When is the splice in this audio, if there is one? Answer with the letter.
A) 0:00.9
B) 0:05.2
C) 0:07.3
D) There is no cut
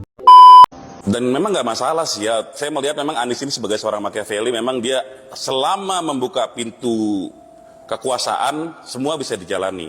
A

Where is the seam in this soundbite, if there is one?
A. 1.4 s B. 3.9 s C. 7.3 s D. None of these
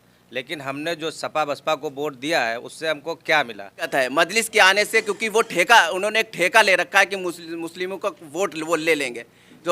B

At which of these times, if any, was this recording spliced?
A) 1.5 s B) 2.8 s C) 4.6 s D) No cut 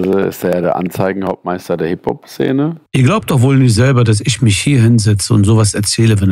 B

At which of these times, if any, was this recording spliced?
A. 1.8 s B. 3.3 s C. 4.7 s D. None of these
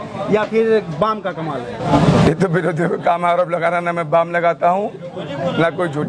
A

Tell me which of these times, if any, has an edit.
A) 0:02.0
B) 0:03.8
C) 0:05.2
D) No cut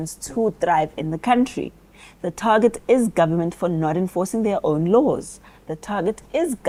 D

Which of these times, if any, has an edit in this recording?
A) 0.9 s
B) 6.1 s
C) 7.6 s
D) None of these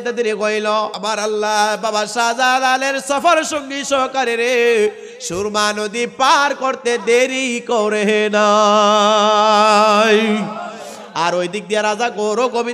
A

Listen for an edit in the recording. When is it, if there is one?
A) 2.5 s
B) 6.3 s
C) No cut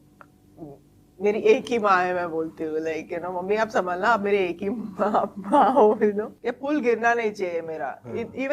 B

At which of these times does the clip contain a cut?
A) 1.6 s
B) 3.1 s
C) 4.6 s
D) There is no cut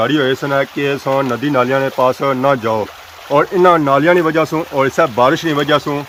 D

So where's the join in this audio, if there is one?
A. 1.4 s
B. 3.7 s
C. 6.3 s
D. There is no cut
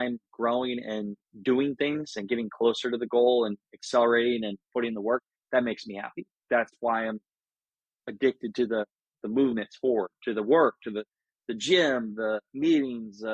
C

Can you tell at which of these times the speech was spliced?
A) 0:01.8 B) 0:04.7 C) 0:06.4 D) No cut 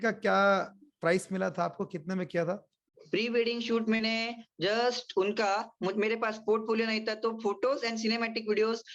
D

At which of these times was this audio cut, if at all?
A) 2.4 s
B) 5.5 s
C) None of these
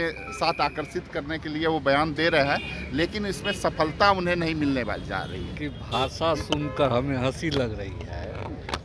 B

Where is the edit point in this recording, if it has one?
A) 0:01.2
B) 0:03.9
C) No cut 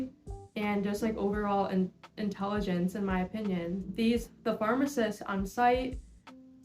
B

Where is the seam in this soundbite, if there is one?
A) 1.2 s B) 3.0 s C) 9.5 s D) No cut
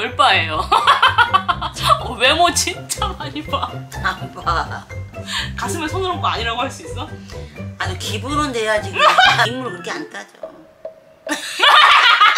C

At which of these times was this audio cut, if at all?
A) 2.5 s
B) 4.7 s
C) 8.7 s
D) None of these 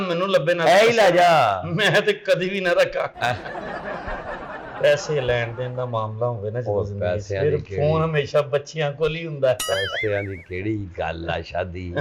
B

